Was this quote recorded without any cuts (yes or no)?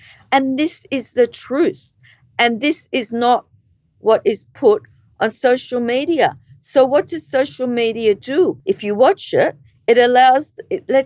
no